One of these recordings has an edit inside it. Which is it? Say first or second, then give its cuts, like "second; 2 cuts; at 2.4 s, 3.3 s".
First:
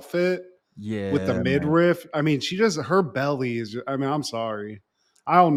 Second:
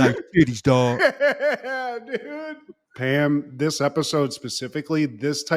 second; 1 cut; at 2.9 s